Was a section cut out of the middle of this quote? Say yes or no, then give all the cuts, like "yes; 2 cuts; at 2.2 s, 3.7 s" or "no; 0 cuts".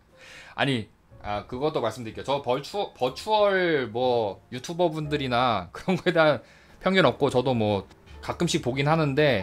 no; 0 cuts